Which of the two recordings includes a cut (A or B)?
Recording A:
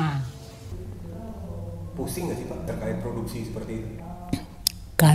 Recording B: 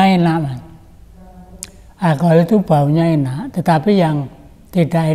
A